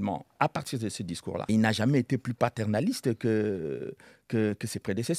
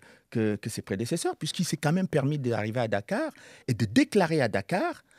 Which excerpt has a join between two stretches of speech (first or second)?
first